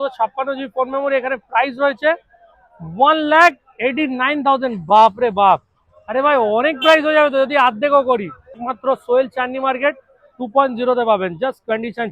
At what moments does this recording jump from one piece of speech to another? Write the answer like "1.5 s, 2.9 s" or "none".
8.7 s